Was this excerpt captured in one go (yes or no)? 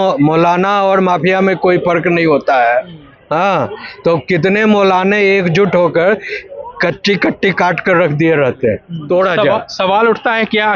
no